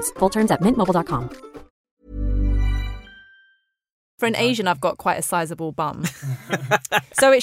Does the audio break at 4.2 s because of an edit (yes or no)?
yes